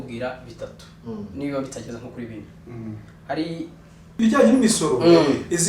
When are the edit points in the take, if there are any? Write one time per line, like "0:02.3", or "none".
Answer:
0:04.2